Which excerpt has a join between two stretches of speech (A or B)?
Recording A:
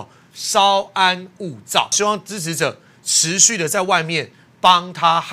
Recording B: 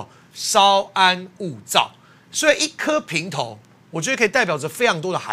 A